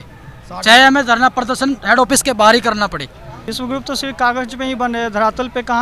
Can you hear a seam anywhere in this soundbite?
yes; 1 cut; at 3.4 s

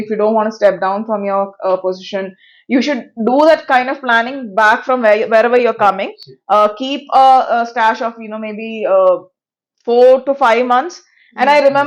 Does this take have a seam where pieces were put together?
no; 0 cuts

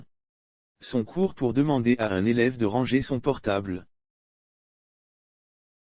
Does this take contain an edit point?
no; 0 cuts

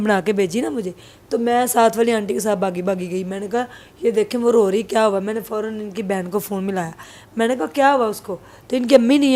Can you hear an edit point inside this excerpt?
no; 0 cuts

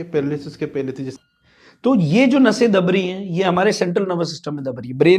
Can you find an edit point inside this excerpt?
yes; 1 cut; at 1.1 s

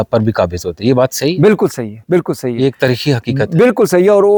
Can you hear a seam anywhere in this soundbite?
no; 0 cuts

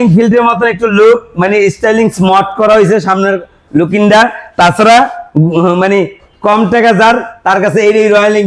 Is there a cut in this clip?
no; 0 cuts

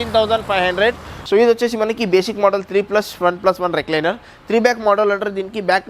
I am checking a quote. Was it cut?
yes; 1 cut; at 1.1 s

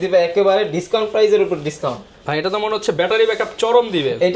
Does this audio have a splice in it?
no; 0 cuts

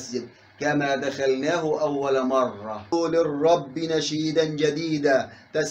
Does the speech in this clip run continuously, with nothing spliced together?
no; 1 cut; at 2.9 s

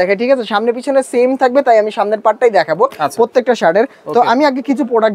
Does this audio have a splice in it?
no; 0 cuts

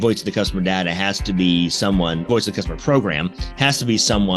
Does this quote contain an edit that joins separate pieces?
yes; 1 cut; at 2.2 s

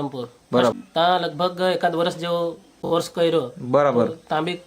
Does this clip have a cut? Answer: yes; 2 cuts; at 0.8 s, 2.7 s

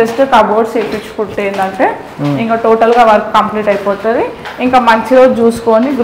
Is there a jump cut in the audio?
no; 0 cuts

